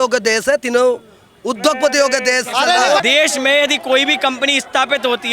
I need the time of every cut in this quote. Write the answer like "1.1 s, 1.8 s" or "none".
3.0 s